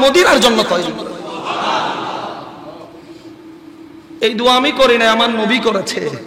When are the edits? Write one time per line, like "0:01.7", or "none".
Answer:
none